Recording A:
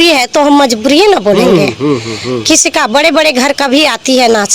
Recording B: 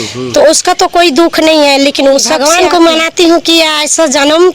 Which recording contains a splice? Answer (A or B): B